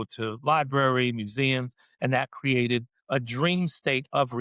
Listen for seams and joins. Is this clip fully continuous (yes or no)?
no